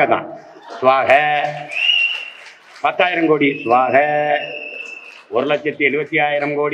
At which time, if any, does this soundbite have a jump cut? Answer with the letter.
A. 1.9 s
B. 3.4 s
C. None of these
C